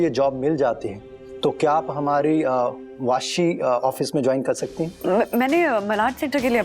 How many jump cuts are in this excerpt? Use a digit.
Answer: 1